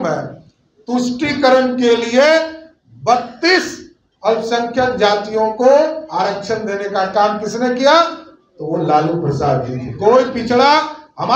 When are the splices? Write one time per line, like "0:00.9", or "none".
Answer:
none

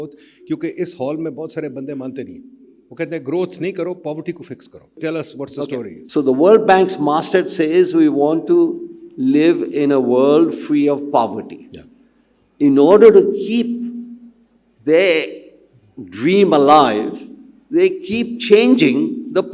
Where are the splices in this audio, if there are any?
0:04.9
0:06.0

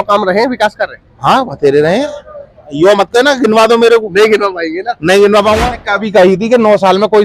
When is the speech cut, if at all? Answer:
0:02.6
0:05.7

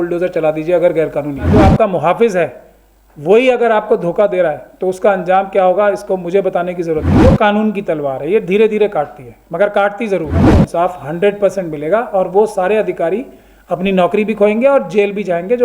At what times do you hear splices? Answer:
0:01.5
0:07.1
0:10.4

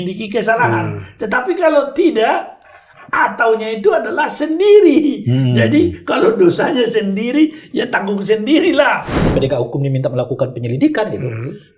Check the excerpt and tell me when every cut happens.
0:09.2

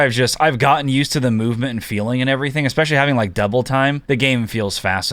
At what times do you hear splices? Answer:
0:04.0

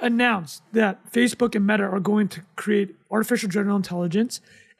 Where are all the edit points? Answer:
none

